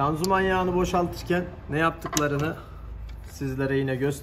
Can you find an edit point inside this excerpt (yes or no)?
no